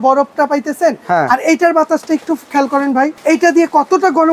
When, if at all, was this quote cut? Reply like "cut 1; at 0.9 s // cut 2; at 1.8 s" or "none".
cut 1; at 3.2 s